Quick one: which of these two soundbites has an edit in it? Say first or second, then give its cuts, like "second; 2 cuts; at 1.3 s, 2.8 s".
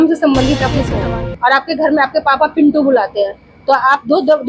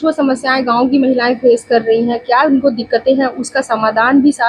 first; 1 cut; at 0.9 s